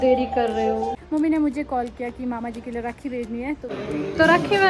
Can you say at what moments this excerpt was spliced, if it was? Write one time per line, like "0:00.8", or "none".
0:01.0
0:03.7